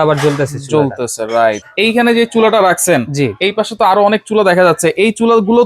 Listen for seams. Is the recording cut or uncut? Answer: cut